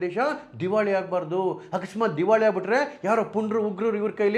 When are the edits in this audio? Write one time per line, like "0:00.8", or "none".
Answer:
none